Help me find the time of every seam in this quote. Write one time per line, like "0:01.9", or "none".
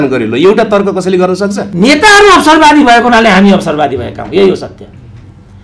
0:01.6